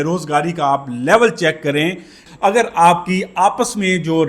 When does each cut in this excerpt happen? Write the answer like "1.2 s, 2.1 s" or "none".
2.2 s